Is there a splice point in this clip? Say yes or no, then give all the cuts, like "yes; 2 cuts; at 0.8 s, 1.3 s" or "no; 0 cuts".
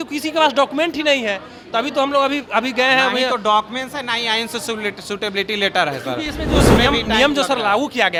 no; 0 cuts